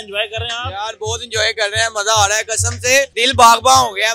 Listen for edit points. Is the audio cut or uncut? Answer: cut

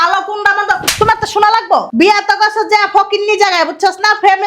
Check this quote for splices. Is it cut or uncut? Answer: cut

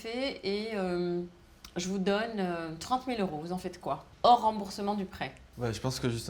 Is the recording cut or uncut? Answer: uncut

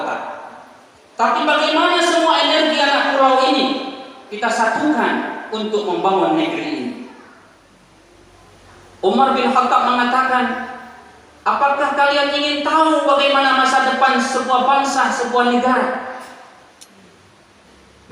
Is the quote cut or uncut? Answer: cut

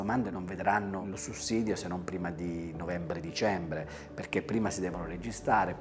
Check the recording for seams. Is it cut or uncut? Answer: uncut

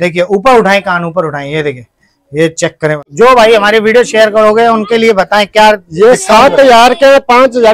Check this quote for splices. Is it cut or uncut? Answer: cut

